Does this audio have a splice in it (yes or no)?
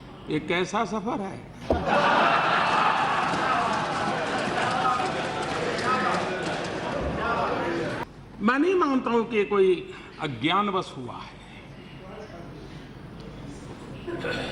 yes